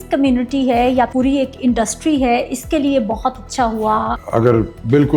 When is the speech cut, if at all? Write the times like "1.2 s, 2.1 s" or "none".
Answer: 1.1 s, 4.2 s